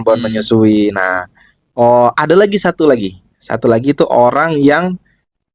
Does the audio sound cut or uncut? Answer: uncut